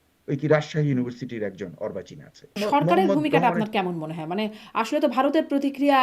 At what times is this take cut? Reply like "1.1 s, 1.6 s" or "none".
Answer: 2.6 s